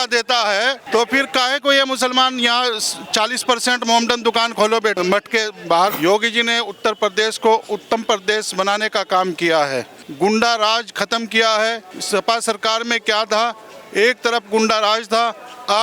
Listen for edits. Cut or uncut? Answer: cut